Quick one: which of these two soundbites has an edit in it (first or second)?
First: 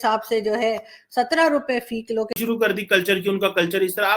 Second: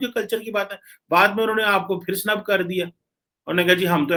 first